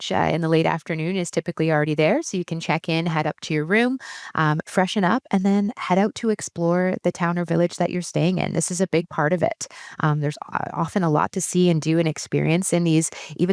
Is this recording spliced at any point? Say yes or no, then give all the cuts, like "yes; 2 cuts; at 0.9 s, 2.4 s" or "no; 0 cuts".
no; 0 cuts